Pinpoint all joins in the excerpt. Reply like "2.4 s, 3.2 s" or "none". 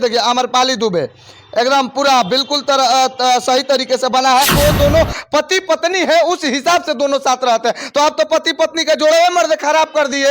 4.5 s